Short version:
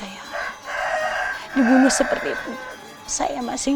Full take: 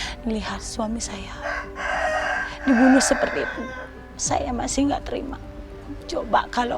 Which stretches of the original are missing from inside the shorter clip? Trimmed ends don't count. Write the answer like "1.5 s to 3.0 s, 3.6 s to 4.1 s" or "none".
none